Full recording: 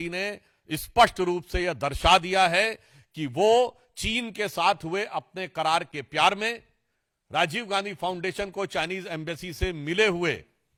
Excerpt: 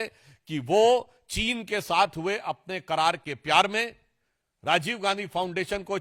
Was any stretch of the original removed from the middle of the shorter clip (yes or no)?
no